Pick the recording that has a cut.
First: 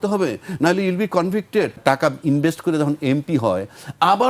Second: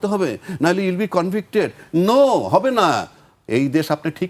first; 1 cut; at 1.8 s

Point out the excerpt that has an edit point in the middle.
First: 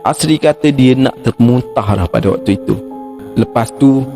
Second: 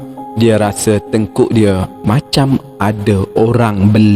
first; 1 cut; at 3.2 s

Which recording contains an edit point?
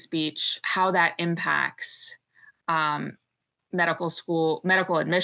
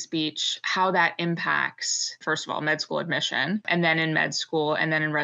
second; 2 cuts; at 2.2 s, 3.6 s

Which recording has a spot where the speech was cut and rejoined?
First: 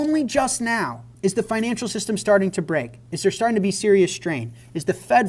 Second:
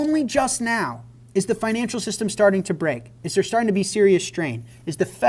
first; 1 cut; at 1.0 s

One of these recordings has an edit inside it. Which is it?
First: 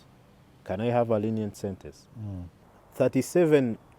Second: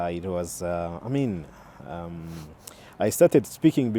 first; 1 cut; at 2.8 s

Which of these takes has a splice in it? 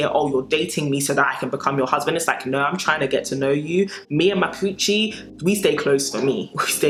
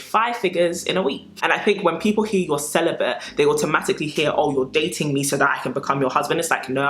second; 1 cut; at 1.3 s

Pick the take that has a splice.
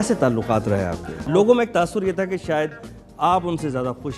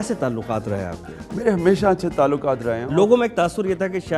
first; 1 cut; at 1.2 s

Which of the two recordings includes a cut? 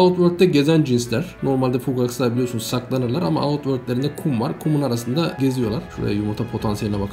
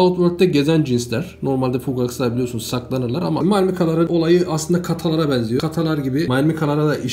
second; 2 cuts; at 3.4 s, 5.8 s

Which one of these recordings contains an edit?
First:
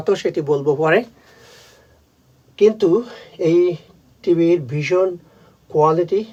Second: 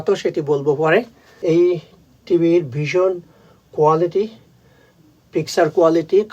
second; 1 cut; at 1.2 s

